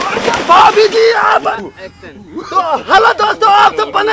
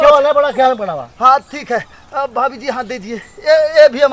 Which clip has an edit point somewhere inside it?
first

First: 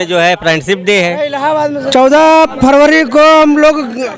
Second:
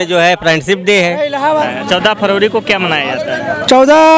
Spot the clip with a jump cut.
first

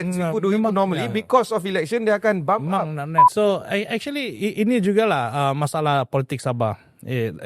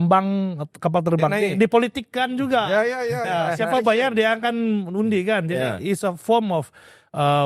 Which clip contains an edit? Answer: first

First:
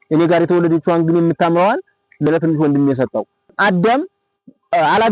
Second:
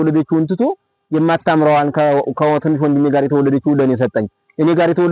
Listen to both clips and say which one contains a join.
first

